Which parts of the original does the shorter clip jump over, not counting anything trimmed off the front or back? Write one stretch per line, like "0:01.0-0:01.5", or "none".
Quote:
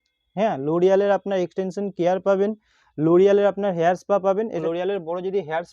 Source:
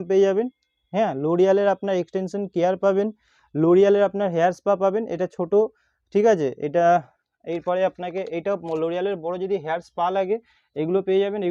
0:05.1-0:08.7